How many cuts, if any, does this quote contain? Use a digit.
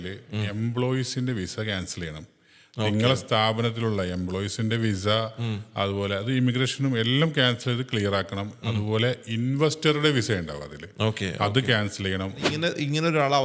1